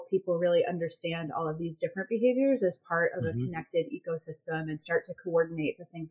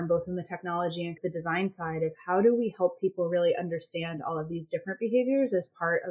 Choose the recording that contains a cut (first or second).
second